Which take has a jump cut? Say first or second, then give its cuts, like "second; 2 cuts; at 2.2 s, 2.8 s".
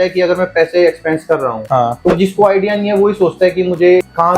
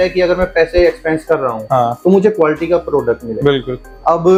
first; 1 cut; at 2.1 s